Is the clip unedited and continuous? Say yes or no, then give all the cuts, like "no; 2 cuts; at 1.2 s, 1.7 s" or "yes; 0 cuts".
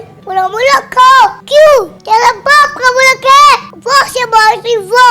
no; 3 cuts; at 1.4 s, 2.0 s, 3.7 s